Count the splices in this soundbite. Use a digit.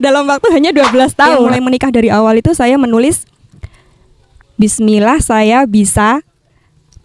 1